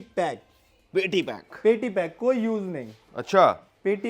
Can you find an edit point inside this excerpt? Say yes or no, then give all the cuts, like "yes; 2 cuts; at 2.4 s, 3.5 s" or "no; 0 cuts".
no; 0 cuts